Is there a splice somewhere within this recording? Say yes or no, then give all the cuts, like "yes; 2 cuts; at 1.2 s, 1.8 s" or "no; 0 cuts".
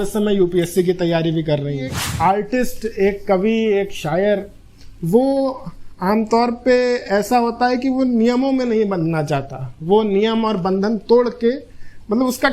yes; 1 cut; at 2.0 s